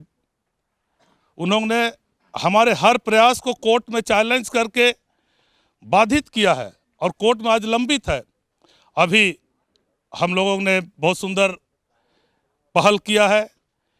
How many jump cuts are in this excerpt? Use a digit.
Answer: 0